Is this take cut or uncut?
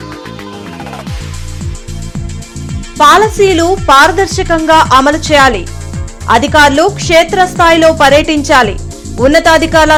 uncut